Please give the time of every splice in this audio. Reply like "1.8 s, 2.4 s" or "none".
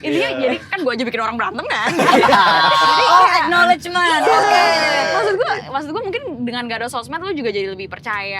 none